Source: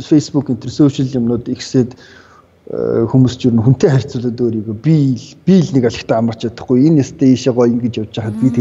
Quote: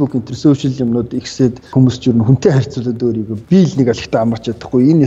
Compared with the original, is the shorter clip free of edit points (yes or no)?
no